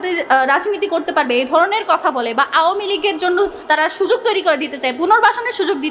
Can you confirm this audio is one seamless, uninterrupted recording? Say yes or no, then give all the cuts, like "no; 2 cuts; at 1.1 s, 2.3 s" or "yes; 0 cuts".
yes; 0 cuts